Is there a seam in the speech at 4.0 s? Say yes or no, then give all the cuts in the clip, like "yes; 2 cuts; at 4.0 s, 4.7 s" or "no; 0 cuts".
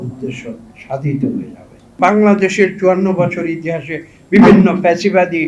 no; 1 cut; at 2.0 s